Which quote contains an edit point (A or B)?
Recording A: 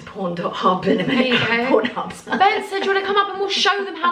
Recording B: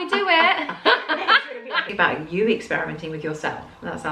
B